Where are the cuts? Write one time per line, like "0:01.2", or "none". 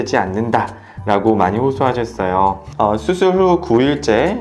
0:02.6